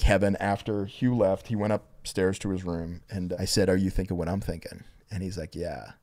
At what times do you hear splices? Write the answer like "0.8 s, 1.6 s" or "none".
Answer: 3.3 s